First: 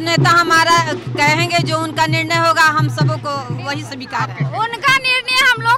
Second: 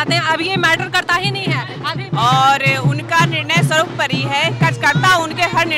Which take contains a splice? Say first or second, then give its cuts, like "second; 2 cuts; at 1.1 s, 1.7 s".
second; 1 cut; at 2.0 s